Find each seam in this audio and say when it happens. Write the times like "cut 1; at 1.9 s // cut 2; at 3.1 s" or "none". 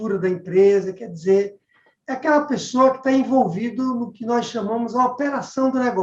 none